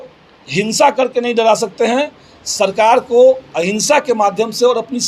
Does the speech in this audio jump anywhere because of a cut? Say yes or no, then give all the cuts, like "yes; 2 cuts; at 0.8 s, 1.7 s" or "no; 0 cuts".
no; 0 cuts